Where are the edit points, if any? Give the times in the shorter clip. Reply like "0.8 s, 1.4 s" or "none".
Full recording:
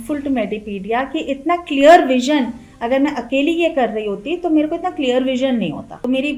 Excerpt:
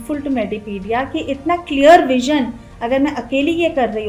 none